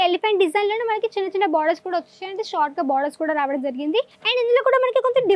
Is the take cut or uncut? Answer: cut